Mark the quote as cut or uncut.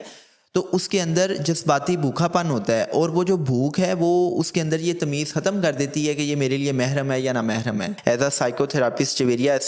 cut